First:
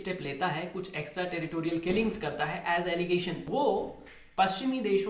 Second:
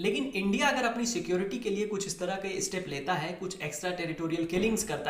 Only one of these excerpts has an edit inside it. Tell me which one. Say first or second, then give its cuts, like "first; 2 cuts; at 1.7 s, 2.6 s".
first; 1 cut; at 3.5 s